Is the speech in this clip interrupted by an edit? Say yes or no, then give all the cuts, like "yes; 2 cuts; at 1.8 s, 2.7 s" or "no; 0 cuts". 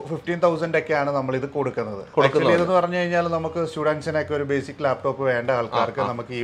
no; 0 cuts